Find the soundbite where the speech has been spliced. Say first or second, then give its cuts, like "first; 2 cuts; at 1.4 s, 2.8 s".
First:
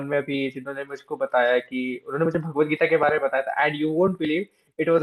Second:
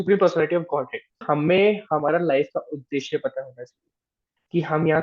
second; 1 cut; at 1.2 s